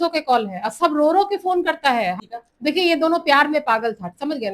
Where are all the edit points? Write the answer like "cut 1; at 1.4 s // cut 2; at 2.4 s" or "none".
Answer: cut 1; at 2.2 s

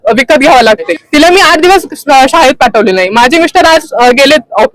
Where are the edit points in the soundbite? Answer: cut 1; at 0.9 s

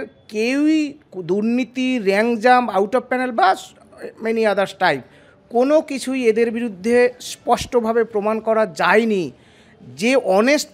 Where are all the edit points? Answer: none

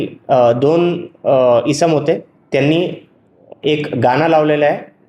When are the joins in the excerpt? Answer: none

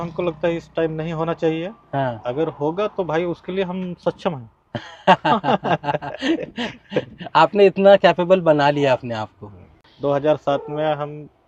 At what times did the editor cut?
none

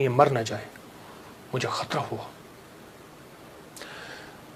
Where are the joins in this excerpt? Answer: none

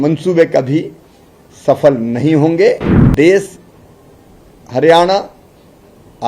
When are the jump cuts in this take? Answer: cut 1; at 3.0 s

